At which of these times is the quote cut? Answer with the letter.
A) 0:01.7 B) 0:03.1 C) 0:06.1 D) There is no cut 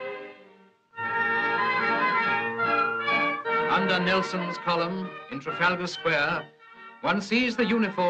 D